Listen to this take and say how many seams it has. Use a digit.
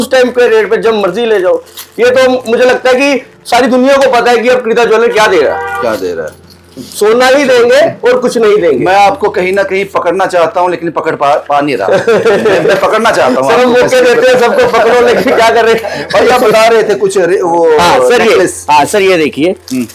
0